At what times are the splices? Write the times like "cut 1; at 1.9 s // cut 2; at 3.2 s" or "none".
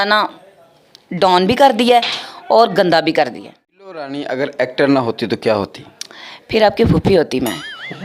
cut 1; at 4.1 s